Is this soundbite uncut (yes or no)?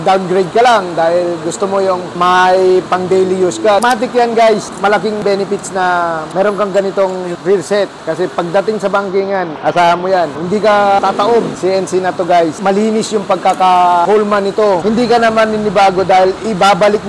no